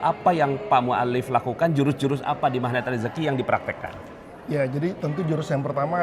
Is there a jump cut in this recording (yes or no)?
no